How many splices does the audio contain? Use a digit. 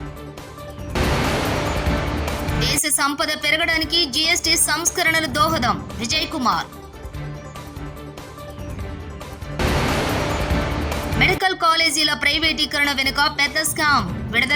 1